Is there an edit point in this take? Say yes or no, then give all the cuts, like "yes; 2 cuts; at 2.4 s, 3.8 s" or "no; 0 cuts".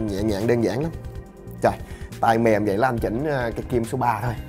no; 0 cuts